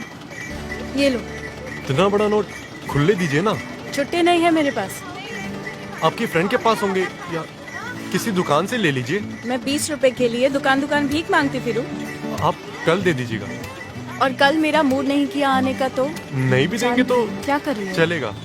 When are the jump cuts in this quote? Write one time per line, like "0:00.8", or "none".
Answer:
0:01.8